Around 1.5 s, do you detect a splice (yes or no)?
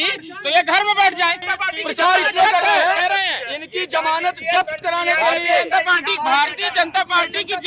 yes